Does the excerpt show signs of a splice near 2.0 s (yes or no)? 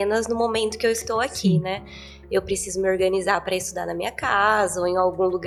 no